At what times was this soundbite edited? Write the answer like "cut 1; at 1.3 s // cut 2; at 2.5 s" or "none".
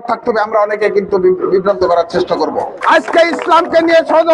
cut 1; at 2.8 s